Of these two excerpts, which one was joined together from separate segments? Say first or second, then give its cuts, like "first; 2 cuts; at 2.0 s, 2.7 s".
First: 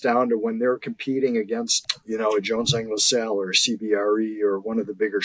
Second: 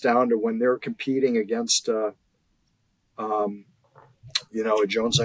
first; 1 cut; at 1.7 s